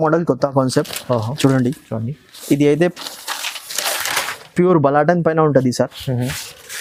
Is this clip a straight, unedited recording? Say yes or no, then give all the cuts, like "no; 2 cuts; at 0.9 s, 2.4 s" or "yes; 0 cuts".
yes; 0 cuts